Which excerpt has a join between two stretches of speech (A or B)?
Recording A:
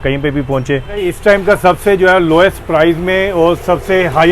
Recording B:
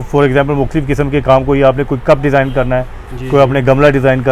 A